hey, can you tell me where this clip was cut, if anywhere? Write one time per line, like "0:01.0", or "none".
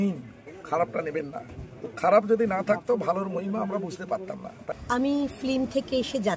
0:04.6